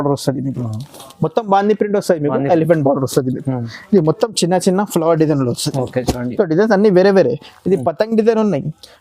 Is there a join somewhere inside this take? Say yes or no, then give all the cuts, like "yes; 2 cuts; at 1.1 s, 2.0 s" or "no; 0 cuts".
no; 0 cuts